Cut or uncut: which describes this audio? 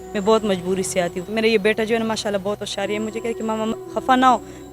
cut